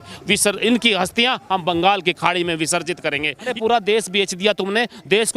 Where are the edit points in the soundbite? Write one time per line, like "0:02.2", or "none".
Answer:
0:03.5